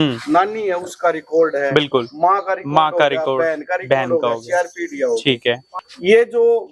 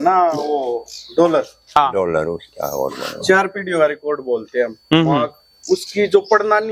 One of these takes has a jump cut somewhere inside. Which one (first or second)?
first